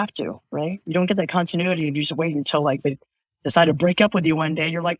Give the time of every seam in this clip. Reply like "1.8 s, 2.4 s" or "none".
none

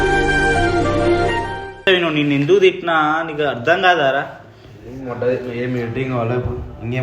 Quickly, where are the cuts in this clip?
1.8 s

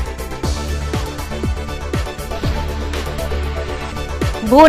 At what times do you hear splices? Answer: 1.2 s

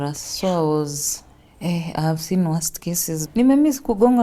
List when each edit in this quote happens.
3.1 s

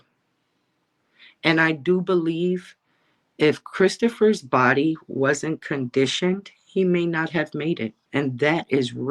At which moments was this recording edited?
8.0 s

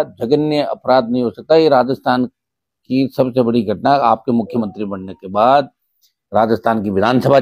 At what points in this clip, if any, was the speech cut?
none

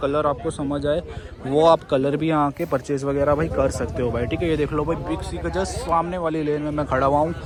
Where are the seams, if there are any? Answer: none

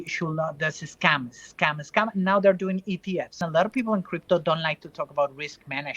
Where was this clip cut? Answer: 3.4 s

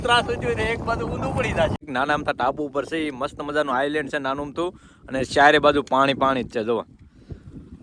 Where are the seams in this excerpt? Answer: 1.8 s

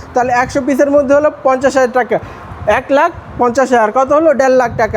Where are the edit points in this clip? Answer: none

